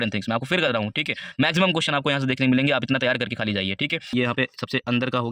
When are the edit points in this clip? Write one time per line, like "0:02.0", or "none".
0:04.1